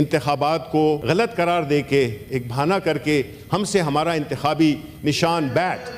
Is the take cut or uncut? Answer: cut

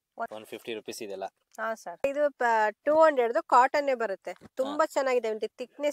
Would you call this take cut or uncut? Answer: uncut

